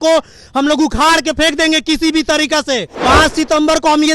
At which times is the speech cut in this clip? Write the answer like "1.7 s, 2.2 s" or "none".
2.9 s